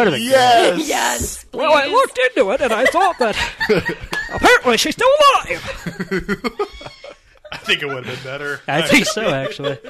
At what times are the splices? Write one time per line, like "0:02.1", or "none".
none